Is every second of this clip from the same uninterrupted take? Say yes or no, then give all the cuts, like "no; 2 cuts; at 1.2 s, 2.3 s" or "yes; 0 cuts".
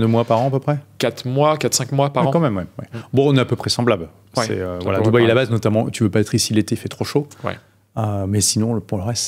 yes; 0 cuts